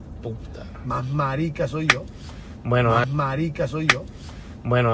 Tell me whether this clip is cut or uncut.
uncut